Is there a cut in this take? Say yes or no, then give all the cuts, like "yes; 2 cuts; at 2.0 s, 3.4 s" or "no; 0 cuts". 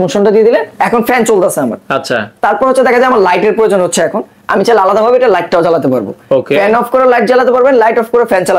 no; 0 cuts